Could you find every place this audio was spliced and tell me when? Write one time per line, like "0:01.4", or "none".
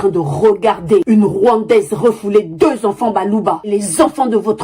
0:03.6